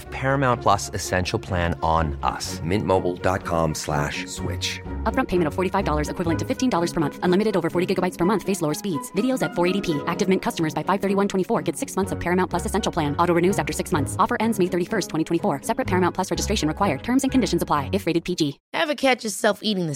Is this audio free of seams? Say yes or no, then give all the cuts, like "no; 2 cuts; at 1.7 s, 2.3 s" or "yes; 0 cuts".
no; 1 cut; at 18.6 s